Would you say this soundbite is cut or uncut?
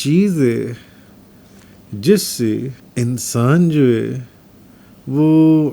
cut